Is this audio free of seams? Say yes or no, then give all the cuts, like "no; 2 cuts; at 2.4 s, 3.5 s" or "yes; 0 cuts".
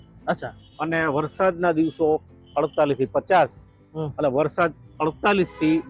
yes; 0 cuts